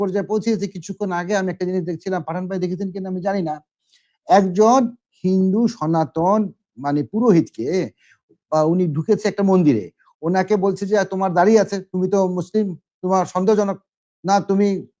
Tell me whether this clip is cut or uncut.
uncut